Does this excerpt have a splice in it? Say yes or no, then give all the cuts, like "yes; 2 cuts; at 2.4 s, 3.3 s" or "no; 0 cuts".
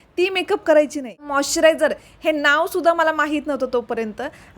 yes; 1 cut; at 1.3 s